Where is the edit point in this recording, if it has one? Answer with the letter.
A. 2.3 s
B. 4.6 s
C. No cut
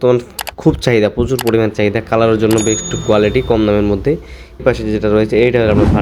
B